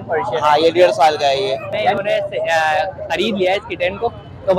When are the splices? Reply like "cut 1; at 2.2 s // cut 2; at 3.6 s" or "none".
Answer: cut 1; at 1.8 s